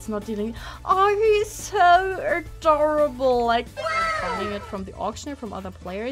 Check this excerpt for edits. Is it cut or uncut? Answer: cut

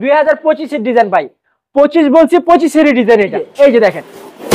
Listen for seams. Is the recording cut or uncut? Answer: cut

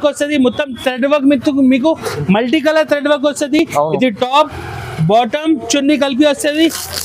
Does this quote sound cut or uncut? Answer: uncut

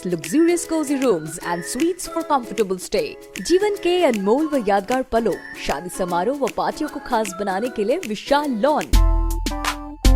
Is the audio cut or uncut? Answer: cut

